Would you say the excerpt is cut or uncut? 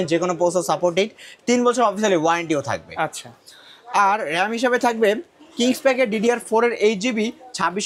uncut